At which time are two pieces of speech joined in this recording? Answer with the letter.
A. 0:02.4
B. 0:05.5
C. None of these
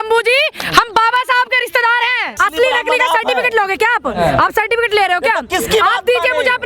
A